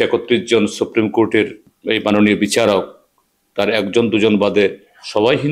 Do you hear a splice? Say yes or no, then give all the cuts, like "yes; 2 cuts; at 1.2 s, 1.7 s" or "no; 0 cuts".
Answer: yes; 1 cut; at 1.7 s